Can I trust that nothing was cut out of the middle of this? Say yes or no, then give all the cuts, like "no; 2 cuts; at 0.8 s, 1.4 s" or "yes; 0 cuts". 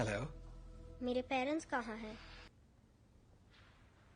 no; 1 cut; at 2.5 s